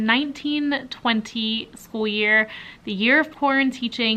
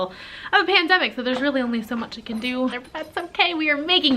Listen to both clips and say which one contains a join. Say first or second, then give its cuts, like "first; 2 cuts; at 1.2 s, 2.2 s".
second; 1 cut; at 2.8 s